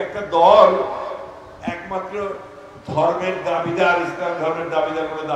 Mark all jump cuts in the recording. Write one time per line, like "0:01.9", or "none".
none